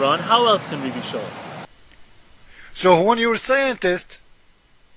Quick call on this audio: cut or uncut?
cut